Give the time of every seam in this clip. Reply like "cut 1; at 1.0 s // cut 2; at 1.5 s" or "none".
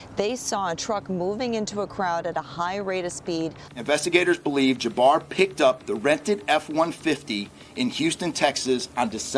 cut 1; at 3.6 s